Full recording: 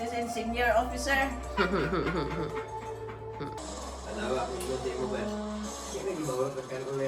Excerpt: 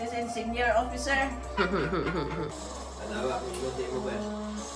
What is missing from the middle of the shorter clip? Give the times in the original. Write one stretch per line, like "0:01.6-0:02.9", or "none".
0:02.5-0:03.6